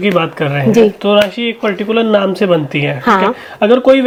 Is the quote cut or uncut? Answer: uncut